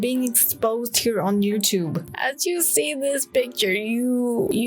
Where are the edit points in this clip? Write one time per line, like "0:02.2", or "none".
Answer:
0:02.0